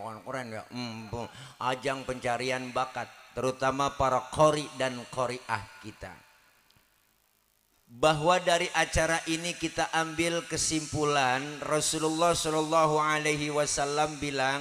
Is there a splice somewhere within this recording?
no; 0 cuts

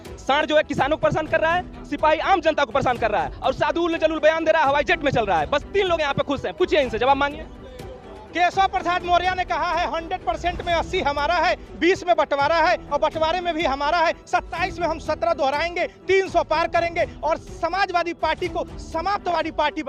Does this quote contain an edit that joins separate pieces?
no; 0 cuts

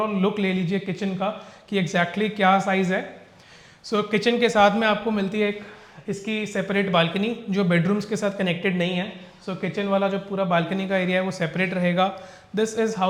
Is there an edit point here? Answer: no; 0 cuts

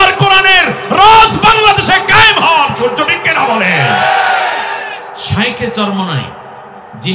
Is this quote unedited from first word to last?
no; 1 cut; at 5.2 s

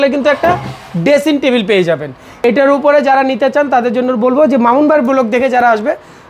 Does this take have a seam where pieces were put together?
yes; 1 cut; at 2.3 s

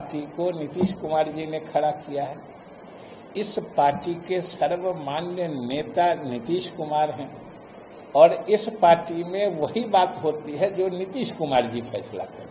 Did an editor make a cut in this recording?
no; 0 cuts

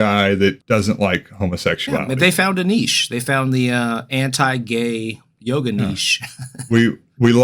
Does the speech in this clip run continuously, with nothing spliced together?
yes; 0 cuts

